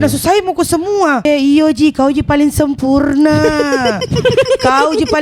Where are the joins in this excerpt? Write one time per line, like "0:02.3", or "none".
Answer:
0:01.3

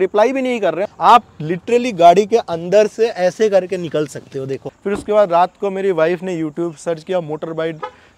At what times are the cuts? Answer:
0:00.9
0:04.7

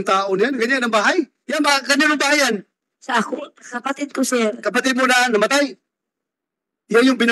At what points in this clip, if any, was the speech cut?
0:05.4

